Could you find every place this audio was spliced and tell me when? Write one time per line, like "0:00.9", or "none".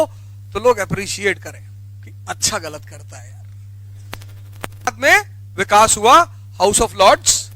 0:04.9